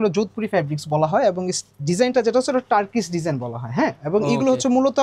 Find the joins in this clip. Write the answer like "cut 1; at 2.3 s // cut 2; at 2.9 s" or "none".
none